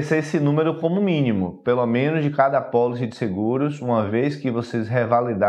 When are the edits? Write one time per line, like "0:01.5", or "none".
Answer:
none